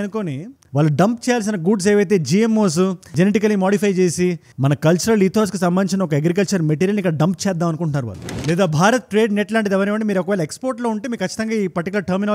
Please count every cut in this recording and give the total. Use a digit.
2